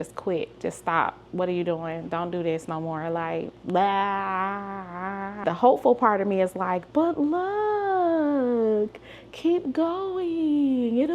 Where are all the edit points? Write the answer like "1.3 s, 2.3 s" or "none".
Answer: 5.4 s